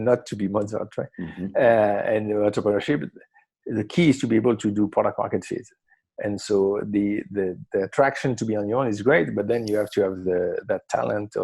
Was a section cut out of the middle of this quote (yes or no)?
no